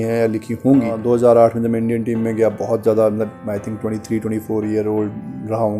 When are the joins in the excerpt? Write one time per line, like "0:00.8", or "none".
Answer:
0:01.0